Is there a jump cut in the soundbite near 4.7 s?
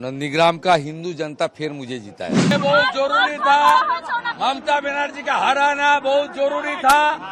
no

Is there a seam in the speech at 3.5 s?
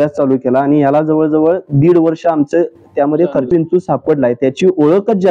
yes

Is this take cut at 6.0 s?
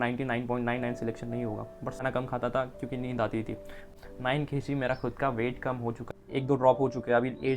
yes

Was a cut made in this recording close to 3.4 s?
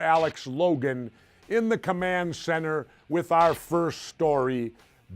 yes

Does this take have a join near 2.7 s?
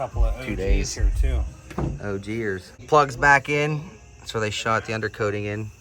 yes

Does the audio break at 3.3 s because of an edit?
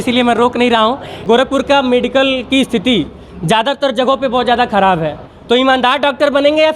no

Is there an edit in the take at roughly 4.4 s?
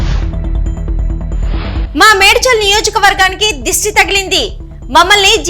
no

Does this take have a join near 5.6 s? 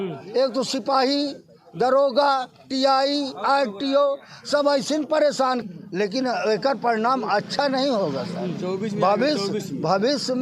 yes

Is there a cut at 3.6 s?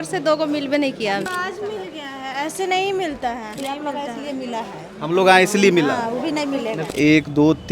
yes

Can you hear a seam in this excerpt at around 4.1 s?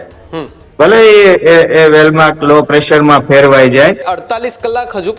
yes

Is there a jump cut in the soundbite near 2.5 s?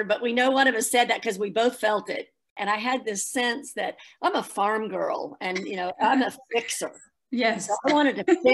yes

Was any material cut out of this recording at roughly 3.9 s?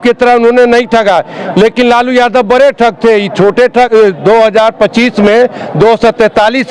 yes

